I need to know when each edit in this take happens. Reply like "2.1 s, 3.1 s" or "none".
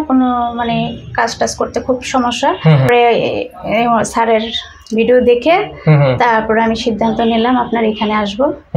2.9 s